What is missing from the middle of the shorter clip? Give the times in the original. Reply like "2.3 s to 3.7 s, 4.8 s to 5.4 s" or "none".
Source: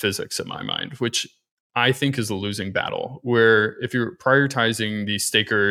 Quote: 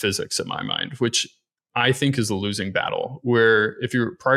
none